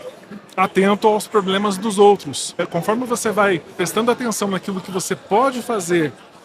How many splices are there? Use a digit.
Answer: 2